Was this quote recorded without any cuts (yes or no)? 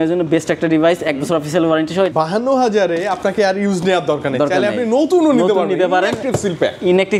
no